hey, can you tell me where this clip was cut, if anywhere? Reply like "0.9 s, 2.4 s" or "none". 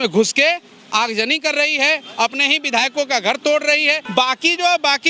4.0 s